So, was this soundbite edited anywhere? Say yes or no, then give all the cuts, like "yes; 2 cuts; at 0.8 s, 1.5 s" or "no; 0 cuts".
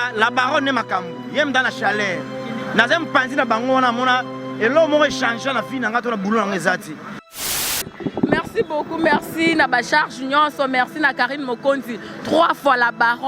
yes; 1 cut; at 7.5 s